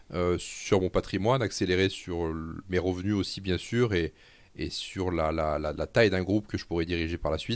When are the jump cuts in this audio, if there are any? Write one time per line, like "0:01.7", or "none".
none

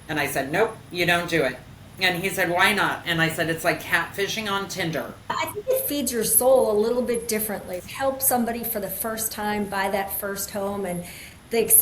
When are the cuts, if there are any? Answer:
0:05.3
0:07.7

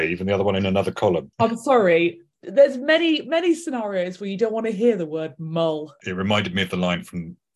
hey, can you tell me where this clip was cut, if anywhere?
0:01.3
0:06.0

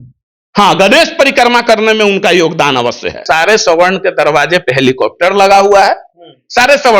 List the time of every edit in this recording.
0:03.2

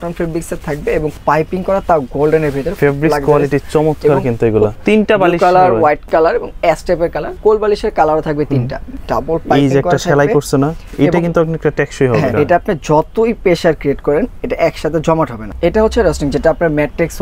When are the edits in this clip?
0:01.2
0:04.7
0:07.3
0:08.8
0:12.3
0:15.5

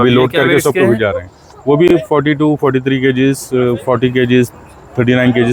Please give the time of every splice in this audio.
none

